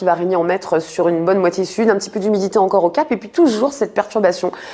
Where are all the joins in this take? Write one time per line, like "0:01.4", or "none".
none